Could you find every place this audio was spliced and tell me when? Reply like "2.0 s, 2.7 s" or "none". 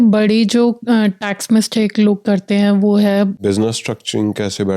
3.4 s